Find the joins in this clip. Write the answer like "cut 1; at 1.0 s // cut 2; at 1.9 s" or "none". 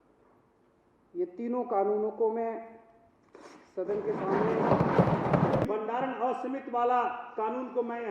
cut 1; at 5.6 s